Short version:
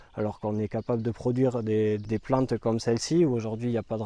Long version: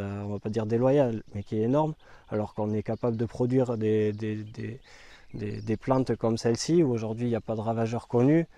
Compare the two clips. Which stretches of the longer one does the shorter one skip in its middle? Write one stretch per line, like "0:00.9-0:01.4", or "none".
0:04.2-0:05.6